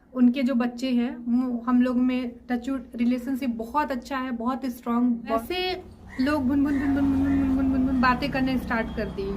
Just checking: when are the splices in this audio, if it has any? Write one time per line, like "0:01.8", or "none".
0:05.4